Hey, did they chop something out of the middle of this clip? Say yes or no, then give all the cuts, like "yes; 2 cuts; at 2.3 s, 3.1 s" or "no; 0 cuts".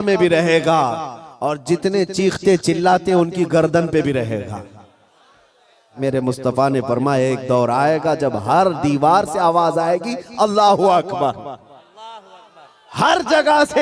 yes; 1 cut; at 5.9 s